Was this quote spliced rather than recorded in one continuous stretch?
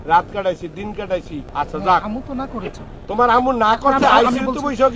yes; 1 cut; at 1.4 s

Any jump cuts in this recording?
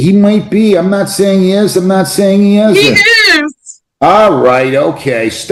no; 0 cuts

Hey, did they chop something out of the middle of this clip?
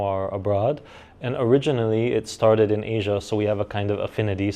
no; 0 cuts

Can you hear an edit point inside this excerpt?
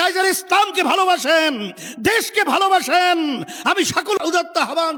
no; 0 cuts

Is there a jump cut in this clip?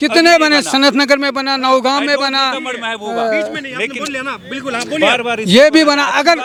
no; 0 cuts

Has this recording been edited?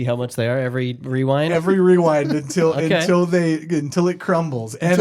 no; 0 cuts

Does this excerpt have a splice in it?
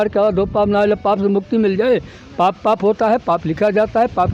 no; 0 cuts

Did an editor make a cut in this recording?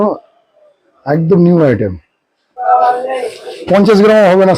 yes; 1 cut; at 2.6 s

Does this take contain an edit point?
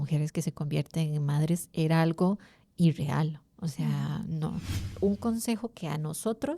yes; 1 cut; at 4.9 s

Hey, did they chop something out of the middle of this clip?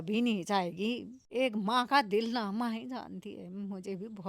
yes; 1 cut; at 1.1 s

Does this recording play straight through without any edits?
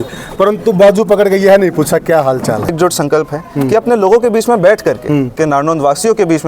no; 2 cuts; at 2.7 s, 5.4 s

